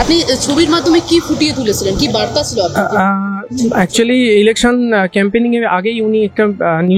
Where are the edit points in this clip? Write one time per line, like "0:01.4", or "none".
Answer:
none